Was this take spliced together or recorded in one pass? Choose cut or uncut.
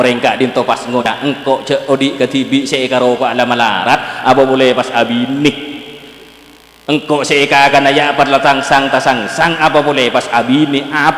cut